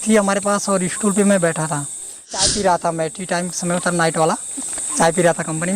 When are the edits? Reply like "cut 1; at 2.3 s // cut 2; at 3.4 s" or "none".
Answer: cut 1; at 2.4 s